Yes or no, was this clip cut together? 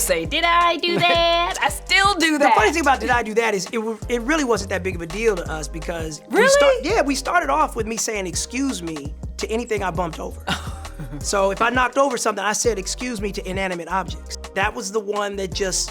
yes